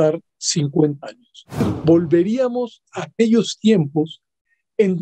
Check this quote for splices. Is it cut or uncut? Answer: cut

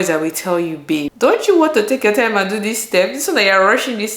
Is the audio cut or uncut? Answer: cut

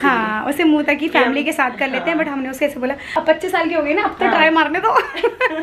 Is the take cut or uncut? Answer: cut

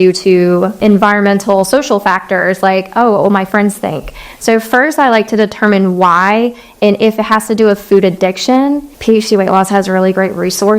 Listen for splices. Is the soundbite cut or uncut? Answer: cut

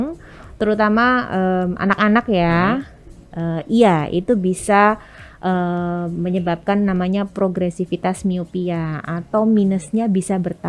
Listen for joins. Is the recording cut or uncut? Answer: uncut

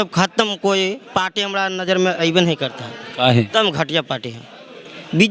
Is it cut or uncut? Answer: uncut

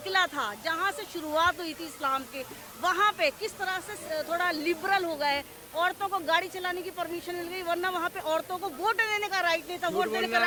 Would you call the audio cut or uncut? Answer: uncut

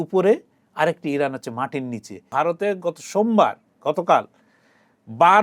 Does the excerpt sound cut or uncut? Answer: cut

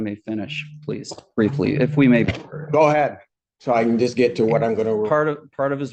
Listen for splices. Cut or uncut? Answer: uncut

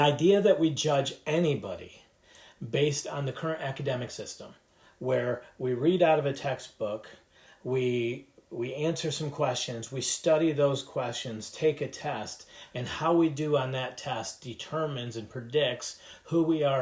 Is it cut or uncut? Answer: uncut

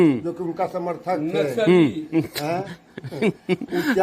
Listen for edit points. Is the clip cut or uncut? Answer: uncut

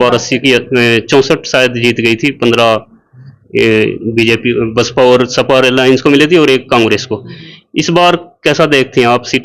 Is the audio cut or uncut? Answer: uncut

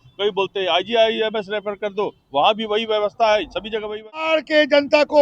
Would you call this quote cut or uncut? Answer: cut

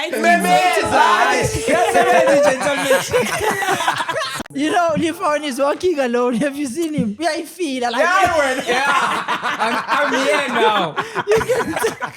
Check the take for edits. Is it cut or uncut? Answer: cut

